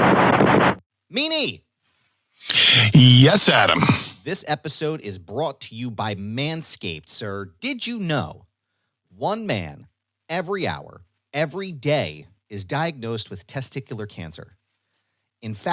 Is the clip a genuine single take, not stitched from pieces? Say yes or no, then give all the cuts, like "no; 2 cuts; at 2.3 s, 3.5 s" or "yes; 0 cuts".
no; 1 cut; at 0.9 s